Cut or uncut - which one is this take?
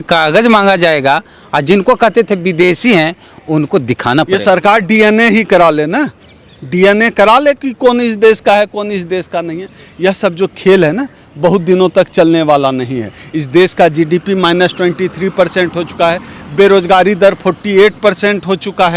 uncut